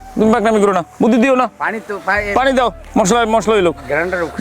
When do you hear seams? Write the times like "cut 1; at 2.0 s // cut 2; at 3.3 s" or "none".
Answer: cut 1; at 0.9 s // cut 2; at 2.8 s